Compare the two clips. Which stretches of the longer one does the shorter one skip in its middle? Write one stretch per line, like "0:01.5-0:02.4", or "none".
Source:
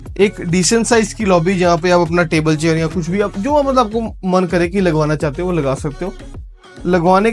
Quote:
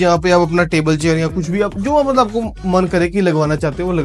none

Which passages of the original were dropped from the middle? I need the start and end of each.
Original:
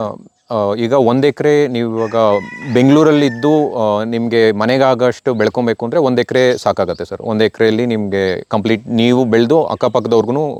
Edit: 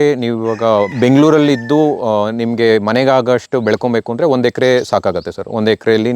0:02.4-0:02.7

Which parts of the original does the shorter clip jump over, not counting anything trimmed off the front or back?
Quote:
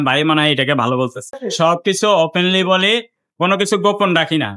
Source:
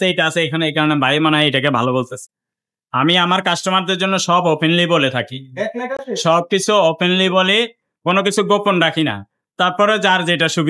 0:02.3-0:06.0

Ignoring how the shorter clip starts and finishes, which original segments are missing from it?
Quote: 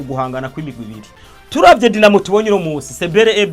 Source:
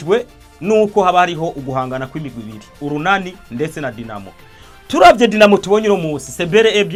0:02.6-0:04.4

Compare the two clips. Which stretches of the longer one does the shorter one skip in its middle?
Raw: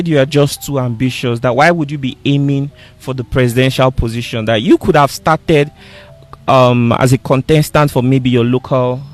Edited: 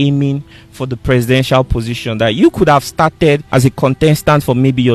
0:05.8-0:07.0

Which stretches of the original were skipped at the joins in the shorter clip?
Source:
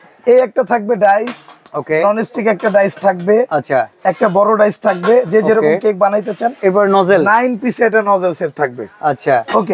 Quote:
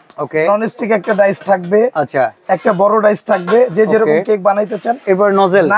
none

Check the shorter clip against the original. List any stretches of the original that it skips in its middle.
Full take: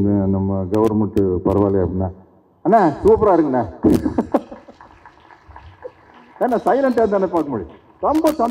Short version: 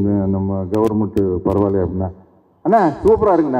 none

